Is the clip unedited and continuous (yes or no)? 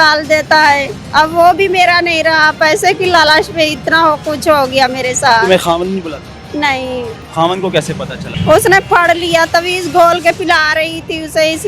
no